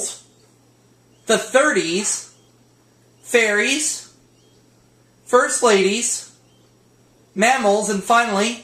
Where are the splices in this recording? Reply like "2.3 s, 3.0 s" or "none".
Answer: 1.1 s

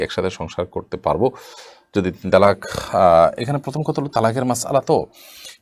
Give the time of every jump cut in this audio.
none

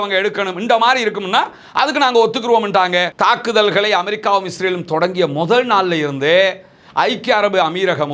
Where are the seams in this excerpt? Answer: 3.1 s

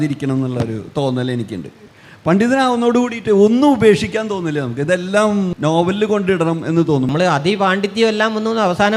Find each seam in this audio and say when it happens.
5.5 s, 7.1 s

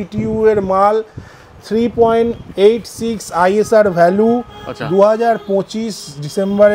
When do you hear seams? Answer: none

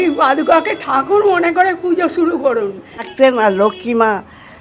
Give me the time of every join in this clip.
3.1 s

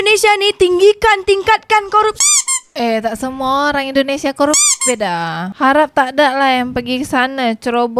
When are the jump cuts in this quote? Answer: 5.5 s

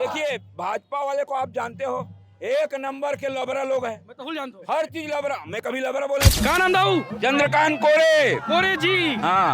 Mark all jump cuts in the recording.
6.3 s

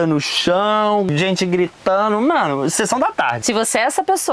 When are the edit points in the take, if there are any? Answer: 1.1 s, 3.4 s

